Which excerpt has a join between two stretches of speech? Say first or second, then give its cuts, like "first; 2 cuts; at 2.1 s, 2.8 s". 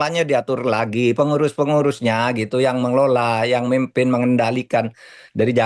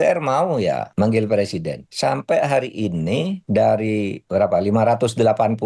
second; 4 cuts; at 0.9 s, 1.8 s, 3.4 s, 4.2 s